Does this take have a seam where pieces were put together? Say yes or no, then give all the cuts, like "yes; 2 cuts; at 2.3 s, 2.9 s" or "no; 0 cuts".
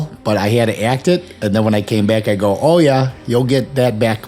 no; 0 cuts